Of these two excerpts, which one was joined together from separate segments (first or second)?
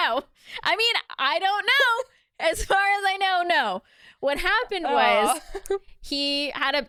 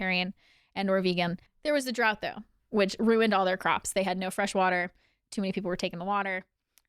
second